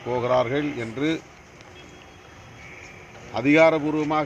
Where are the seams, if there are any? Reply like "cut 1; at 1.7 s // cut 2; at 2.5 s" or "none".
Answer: none